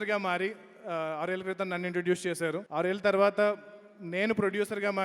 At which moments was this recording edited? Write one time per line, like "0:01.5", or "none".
0:02.6

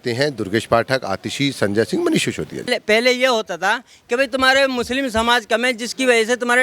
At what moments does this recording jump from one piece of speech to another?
0:02.8

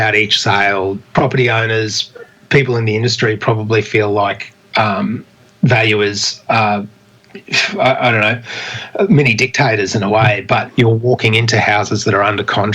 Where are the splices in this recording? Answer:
0:01.1
0:10.7

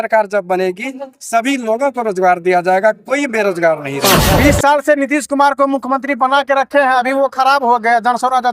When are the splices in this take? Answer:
0:04.2

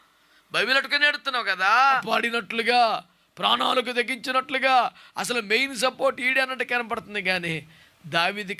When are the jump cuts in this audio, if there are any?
0:02.0

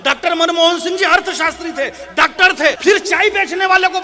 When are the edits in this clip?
0:02.8

